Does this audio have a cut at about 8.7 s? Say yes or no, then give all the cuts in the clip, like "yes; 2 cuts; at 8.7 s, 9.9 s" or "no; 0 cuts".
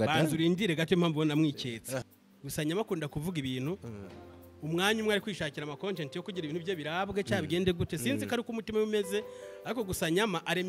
no; 1 cut; at 2.0 s